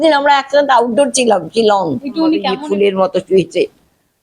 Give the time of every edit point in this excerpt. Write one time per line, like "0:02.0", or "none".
0:02.2